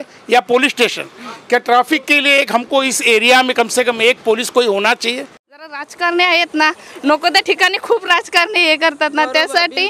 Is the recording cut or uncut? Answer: cut